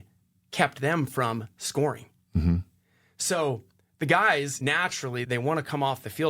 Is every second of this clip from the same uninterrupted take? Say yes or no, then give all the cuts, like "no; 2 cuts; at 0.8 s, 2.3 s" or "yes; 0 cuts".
no; 1 cut; at 4.7 s